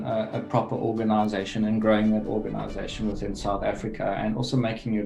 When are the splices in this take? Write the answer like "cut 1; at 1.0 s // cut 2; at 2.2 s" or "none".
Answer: none